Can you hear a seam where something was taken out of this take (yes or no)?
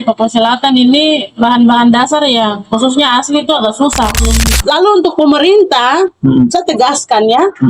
yes